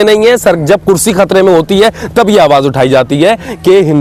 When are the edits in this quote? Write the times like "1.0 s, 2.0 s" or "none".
none